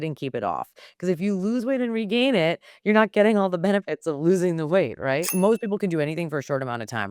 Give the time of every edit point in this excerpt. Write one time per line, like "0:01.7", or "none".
0:05.3